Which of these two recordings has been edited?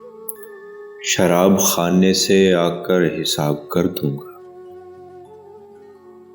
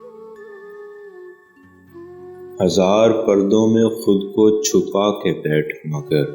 second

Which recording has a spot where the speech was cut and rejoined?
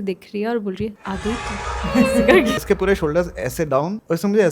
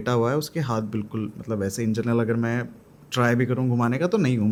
first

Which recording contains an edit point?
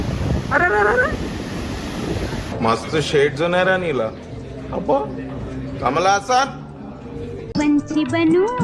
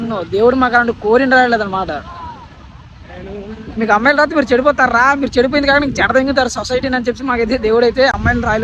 first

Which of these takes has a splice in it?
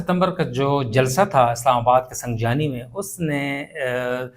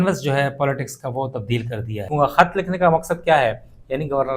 second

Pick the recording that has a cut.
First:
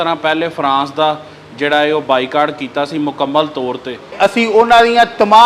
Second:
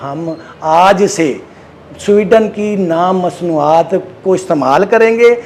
first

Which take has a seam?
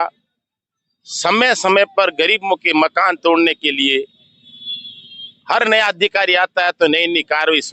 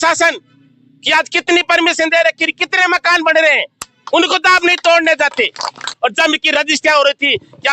second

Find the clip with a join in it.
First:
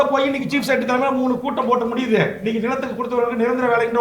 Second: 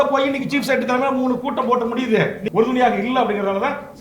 second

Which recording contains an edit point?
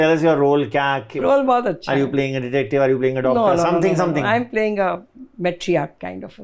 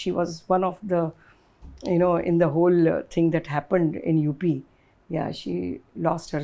first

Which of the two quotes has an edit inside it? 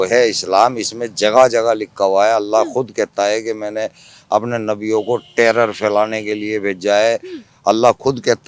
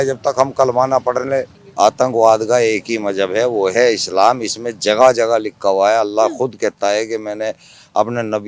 second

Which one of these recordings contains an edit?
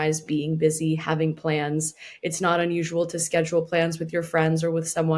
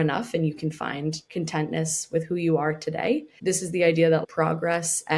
second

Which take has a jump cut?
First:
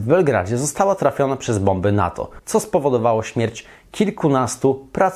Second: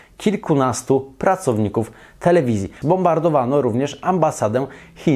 second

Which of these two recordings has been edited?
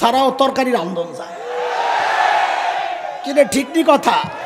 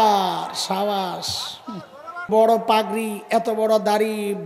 second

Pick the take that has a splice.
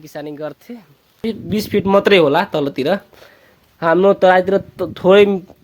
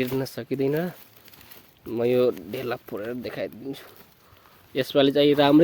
first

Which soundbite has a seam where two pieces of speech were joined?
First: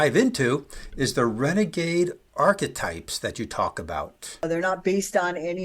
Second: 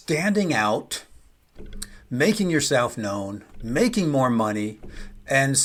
first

